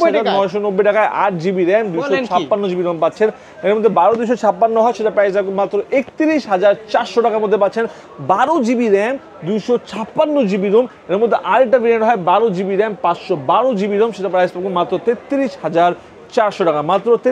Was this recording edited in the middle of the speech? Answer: no; 0 cuts

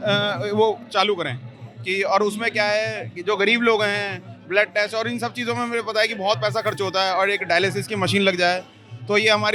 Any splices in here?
no; 0 cuts

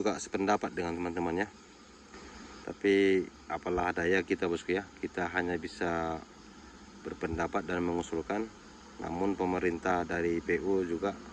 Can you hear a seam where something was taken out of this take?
no; 0 cuts

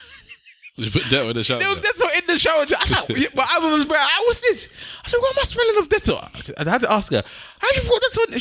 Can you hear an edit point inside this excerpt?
no; 0 cuts

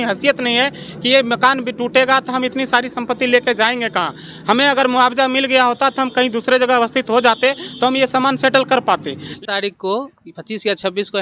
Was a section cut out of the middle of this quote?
yes; 1 cut; at 9.2 s

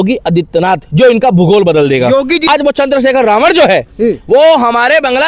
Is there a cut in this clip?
yes; 1 cut; at 2.5 s

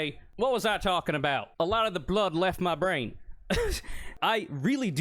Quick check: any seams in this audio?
yes; 1 cut; at 4.1 s

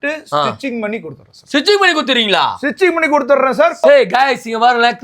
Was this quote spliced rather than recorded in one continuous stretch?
yes; 1 cut; at 3.8 s

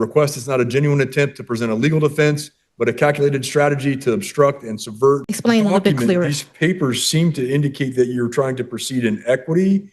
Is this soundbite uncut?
no; 1 cut; at 5.3 s

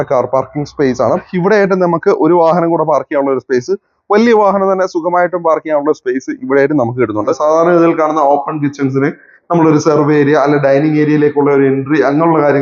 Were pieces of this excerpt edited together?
yes; 2 cuts; at 1.3 s, 7.4 s

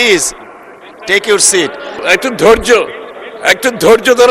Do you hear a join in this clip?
yes; 1 cut; at 2.0 s

